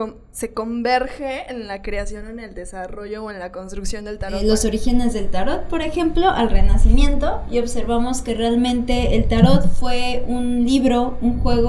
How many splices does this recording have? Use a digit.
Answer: 1